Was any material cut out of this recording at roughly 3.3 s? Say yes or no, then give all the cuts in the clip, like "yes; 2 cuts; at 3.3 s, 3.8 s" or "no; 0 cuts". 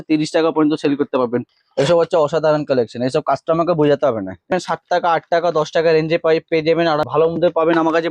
no; 3 cuts; at 1.5 s, 4.5 s, 7.1 s